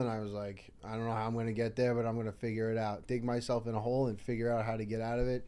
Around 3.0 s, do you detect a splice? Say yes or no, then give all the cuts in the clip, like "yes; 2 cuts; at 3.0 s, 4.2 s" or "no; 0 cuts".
yes; 1 cut; at 3.0 s